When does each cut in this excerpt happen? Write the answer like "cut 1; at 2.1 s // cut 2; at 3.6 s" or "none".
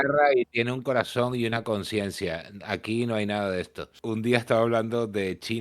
cut 1; at 3.9 s